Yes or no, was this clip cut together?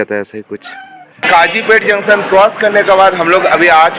yes